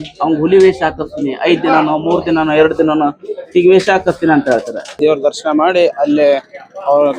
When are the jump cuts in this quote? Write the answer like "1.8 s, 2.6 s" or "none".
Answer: 5.0 s